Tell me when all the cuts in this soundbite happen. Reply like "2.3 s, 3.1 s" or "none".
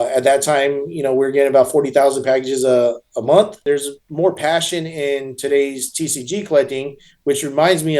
3.6 s